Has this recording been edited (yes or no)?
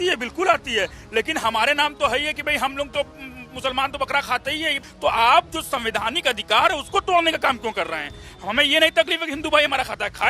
yes